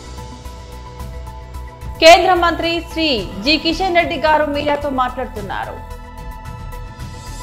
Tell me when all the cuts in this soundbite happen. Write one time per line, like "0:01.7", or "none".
none